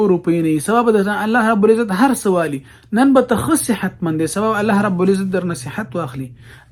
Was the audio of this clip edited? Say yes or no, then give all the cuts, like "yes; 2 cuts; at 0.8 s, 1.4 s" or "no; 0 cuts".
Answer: no; 0 cuts